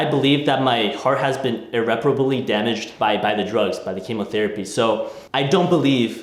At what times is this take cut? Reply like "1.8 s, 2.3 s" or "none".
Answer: 2.9 s, 5.2 s